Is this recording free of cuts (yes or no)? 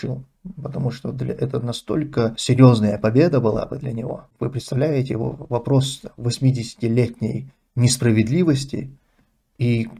no